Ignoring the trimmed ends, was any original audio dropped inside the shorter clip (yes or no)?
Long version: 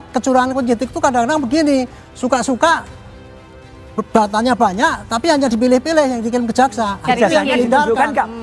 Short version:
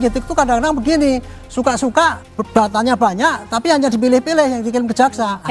yes